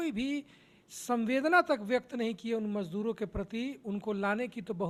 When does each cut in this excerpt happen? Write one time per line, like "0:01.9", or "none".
none

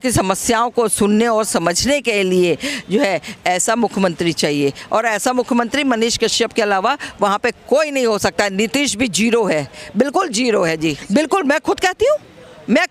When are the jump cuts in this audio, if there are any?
0:11.0

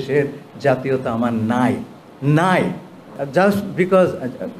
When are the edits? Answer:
0:03.2

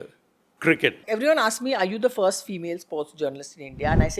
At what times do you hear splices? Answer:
0:01.1

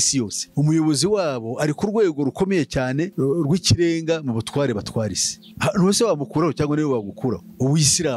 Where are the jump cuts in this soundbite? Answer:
none

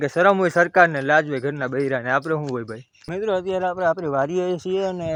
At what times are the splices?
none

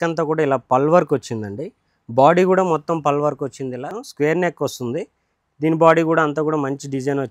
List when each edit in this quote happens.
0:04.0

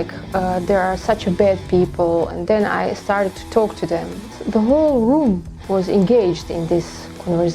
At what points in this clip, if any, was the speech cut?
0:02.3
0:04.4

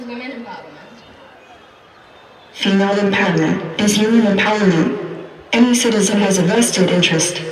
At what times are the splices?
none

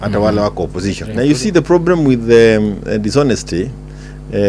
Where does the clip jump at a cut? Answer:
0:01.1

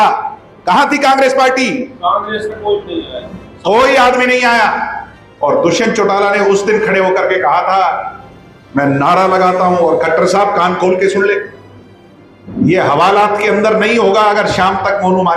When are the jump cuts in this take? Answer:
none

